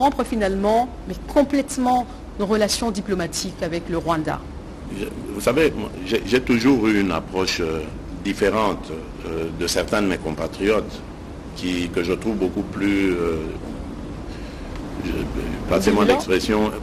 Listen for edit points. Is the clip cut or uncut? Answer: uncut